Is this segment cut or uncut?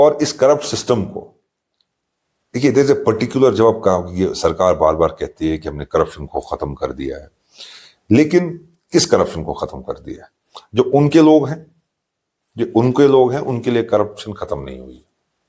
uncut